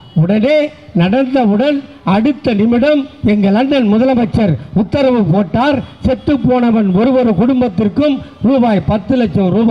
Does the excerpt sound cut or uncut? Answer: uncut